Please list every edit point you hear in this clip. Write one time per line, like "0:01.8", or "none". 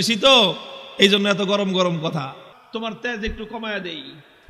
0:02.5